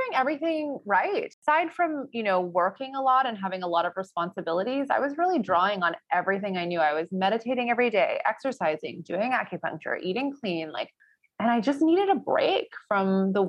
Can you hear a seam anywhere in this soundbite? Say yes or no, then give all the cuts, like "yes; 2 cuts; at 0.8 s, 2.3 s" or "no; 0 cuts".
yes; 1 cut; at 1.3 s